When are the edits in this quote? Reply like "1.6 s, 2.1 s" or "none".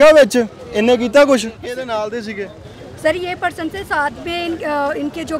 1.6 s